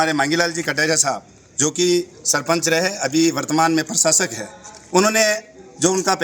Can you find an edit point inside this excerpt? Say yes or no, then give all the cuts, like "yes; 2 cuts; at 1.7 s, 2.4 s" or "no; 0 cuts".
no; 0 cuts